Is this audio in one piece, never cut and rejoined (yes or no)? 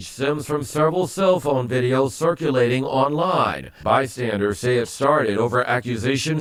yes